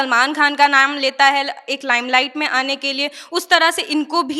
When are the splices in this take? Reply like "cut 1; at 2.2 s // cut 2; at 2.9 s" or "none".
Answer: none

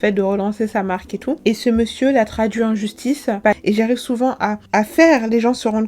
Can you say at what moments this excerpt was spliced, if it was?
cut 1; at 3.6 s

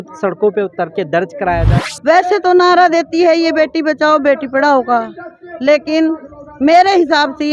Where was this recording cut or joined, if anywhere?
cut 1; at 1.7 s

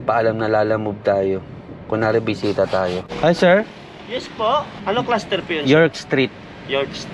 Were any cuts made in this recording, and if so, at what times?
cut 1; at 3.1 s // cut 2; at 4.8 s

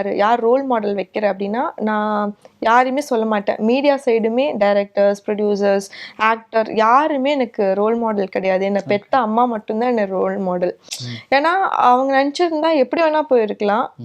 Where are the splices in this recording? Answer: none

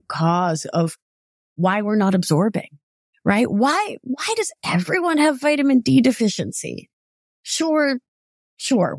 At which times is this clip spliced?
none

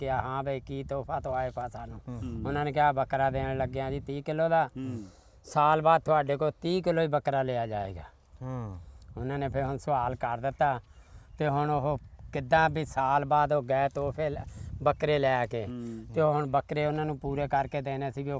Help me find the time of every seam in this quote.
none

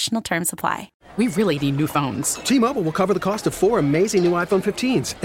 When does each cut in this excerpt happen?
cut 1; at 1.0 s

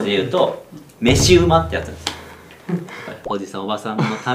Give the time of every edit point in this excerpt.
cut 1; at 3.2 s

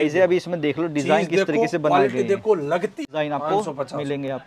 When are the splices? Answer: cut 1; at 3.0 s

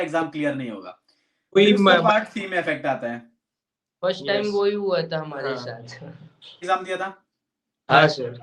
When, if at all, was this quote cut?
cut 1; at 6.6 s

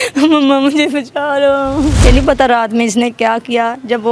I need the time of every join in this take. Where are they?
cut 1; at 2.0 s

